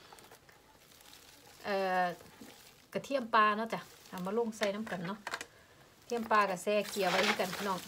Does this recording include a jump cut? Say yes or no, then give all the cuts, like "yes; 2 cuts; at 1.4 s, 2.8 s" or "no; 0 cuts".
no; 0 cuts